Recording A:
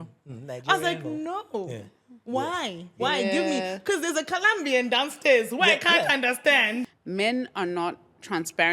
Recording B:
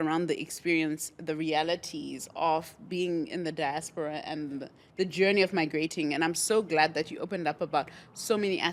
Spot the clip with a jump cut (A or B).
A